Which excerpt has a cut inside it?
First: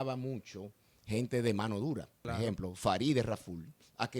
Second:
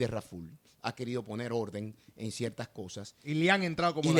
first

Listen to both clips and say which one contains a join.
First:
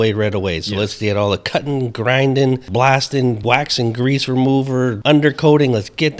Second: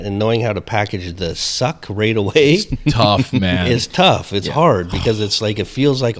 first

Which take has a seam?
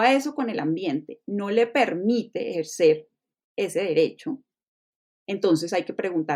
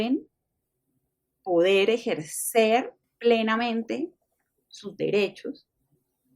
second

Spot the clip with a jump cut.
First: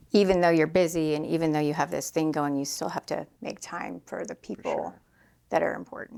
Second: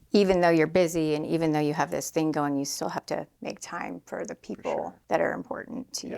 second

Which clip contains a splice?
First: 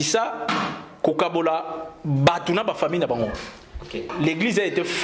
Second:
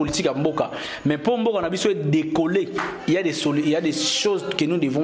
first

